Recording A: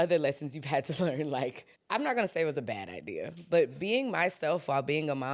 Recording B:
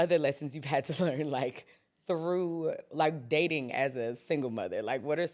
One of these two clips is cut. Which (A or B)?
A